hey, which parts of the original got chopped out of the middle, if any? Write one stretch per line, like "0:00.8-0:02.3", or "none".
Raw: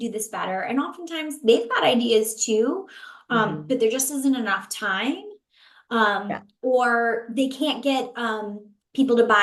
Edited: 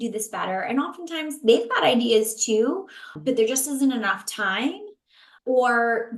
0:03.1-0:03.6
0:05.8-0:06.5